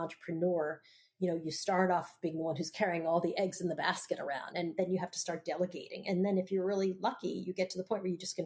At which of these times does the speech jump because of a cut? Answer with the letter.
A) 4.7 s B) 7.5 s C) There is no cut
A